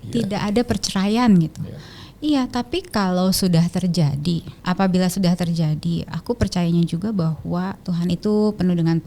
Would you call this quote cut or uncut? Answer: cut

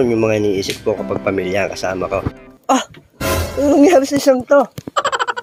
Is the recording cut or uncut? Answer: cut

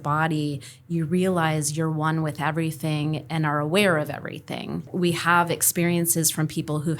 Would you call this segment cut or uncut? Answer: cut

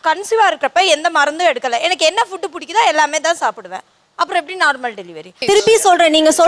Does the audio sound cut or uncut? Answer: cut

